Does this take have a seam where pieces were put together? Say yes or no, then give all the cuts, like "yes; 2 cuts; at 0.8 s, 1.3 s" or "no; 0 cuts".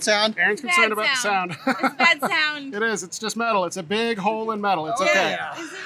no; 0 cuts